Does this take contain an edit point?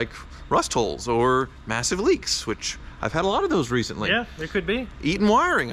no; 0 cuts

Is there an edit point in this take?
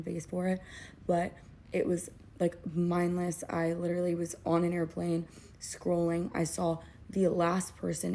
no; 0 cuts

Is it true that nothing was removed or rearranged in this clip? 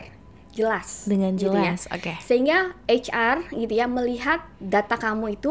yes; 0 cuts

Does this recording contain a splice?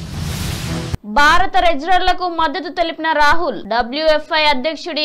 yes; 1 cut; at 1.0 s

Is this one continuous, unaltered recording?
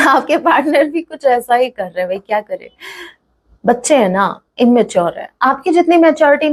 yes; 0 cuts

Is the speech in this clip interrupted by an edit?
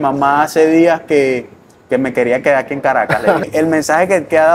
yes; 1 cut; at 3.4 s

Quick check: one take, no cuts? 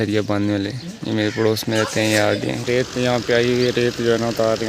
no; 1 cut; at 2.7 s

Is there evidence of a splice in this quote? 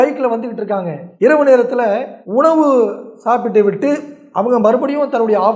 yes; 2 cuts; at 1.0 s, 2.1 s

